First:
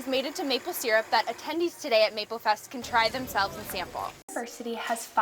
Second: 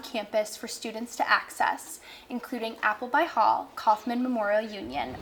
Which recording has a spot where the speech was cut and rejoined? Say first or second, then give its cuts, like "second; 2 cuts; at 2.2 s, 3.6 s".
first; 1 cut; at 4.3 s